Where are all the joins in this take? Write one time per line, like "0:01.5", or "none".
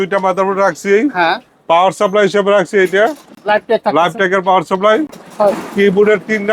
none